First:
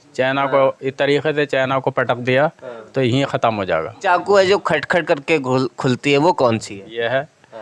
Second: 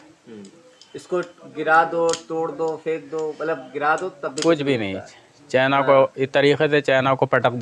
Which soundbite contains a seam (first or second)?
first